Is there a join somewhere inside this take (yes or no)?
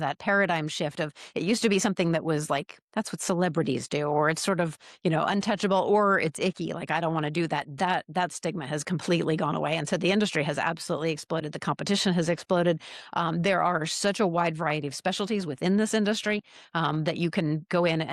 no